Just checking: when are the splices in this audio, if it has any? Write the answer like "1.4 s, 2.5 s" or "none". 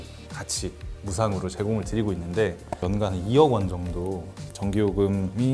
none